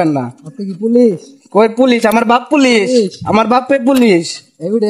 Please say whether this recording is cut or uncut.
uncut